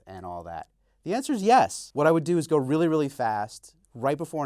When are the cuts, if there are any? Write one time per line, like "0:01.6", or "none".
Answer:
0:01.8